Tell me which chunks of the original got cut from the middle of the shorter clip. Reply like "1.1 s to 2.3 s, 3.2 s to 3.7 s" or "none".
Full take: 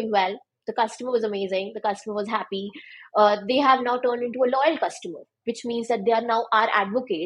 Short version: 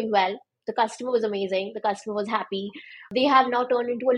3.1 s to 3.4 s